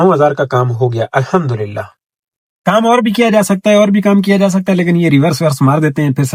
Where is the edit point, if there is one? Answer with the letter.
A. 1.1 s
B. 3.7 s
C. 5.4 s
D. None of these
D